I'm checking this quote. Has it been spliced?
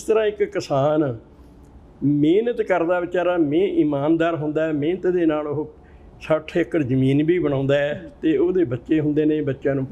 no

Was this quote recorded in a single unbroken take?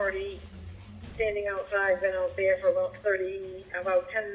yes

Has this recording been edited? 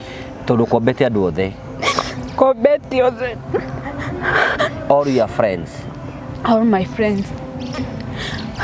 no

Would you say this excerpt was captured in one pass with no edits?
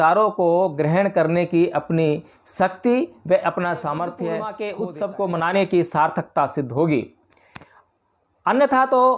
no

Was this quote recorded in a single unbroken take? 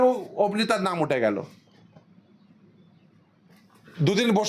yes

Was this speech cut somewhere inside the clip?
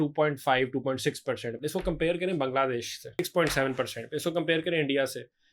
yes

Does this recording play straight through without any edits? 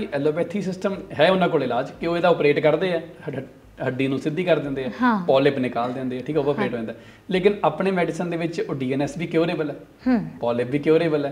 yes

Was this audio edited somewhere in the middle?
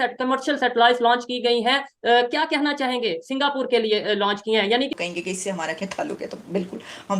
yes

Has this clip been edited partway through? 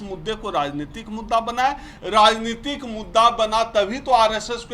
no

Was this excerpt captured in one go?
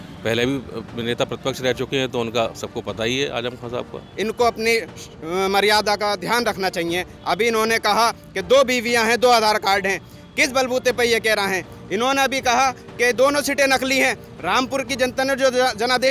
no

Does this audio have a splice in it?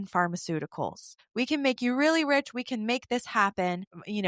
no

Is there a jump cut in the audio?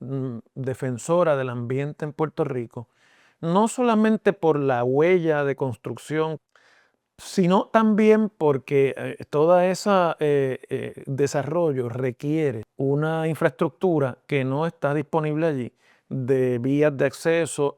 yes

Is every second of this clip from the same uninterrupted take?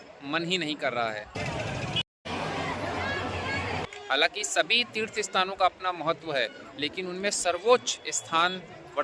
no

